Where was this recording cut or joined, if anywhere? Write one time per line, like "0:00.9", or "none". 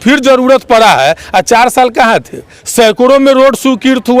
0:02.6